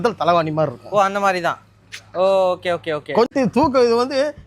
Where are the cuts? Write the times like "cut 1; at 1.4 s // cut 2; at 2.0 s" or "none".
cut 1; at 3.3 s